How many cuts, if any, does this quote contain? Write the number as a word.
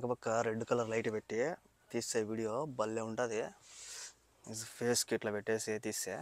zero